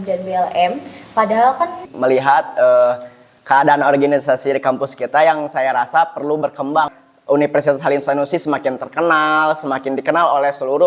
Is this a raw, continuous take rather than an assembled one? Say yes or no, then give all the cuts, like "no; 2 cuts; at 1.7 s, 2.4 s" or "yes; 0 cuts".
no; 2 cuts; at 1.9 s, 7.0 s